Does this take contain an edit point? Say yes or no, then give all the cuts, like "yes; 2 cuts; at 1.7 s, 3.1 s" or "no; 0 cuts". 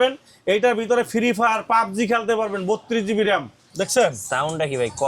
yes; 1 cut; at 3.6 s